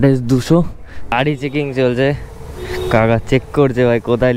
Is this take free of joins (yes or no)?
no